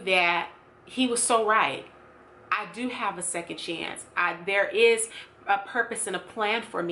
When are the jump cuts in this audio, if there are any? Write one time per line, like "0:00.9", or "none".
none